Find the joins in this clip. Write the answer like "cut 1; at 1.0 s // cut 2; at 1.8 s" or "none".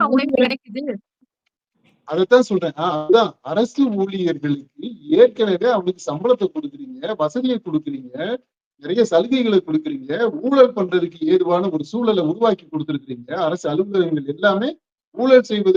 none